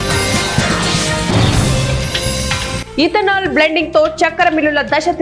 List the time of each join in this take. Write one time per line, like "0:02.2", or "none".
none